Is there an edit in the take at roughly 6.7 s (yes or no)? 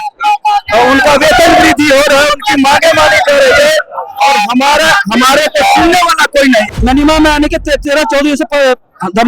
yes